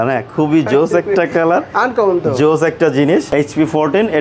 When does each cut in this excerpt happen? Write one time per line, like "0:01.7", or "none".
0:03.3